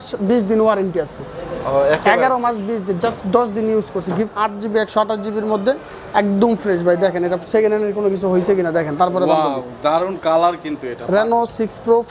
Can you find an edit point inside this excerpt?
yes; 2 cuts; at 4.3 s, 10.9 s

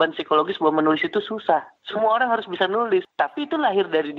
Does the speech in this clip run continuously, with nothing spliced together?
no; 1 cut; at 3.1 s

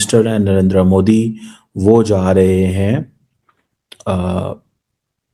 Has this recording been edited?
no; 0 cuts

